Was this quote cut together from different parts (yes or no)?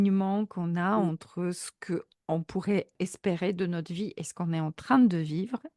yes